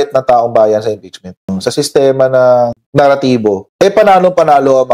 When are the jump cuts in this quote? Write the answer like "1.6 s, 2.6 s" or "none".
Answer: 1.4 s

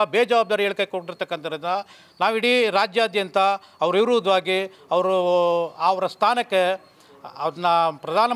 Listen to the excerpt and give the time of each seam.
none

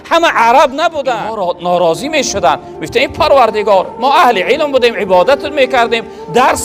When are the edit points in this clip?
1.3 s

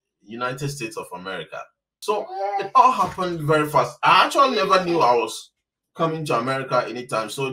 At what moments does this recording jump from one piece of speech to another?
2.0 s

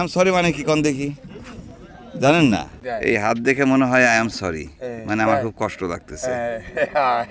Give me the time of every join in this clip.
2.8 s

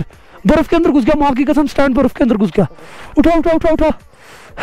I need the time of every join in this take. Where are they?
none

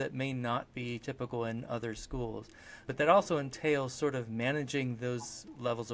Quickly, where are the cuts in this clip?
2.9 s

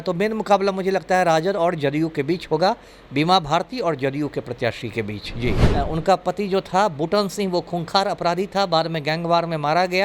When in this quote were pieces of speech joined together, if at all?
5.6 s

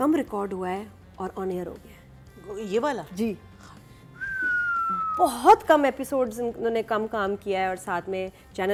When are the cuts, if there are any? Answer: none

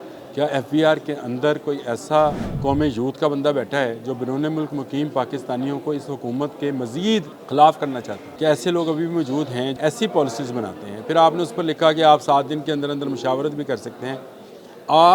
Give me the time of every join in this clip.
2.5 s, 7.4 s, 8.2 s, 9.7 s

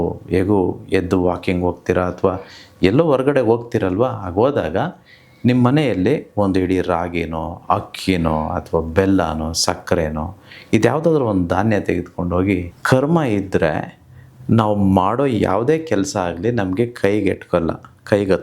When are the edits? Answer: 12.7 s

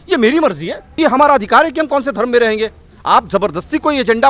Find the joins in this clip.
1.0 s

